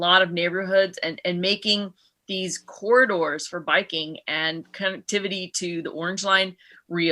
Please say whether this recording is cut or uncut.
uncut